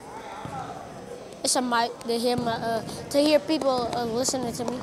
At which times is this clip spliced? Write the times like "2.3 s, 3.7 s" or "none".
none